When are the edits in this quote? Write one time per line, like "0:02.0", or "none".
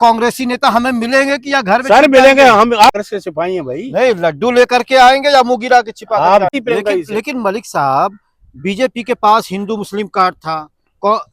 0:03.0
0:06.5